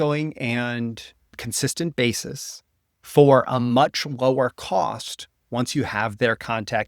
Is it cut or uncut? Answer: cut